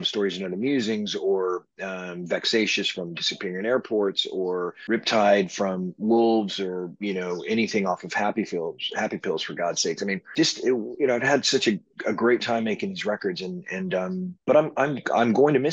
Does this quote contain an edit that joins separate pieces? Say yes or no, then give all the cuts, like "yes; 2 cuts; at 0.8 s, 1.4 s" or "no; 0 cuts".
no; 0 cuts